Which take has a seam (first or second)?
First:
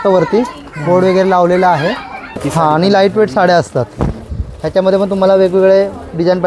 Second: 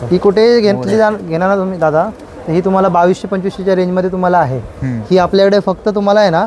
first